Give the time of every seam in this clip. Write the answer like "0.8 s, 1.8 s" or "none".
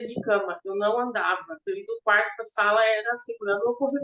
none